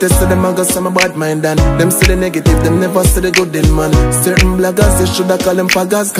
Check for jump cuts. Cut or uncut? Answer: uncut